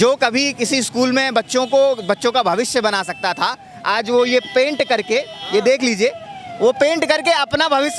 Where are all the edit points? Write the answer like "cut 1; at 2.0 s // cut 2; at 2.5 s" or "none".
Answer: none